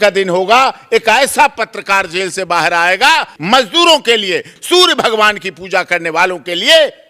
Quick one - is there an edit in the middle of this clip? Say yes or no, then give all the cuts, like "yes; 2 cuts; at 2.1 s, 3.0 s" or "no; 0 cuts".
yes; 2 cuts; at 3.4 s, 4.5 s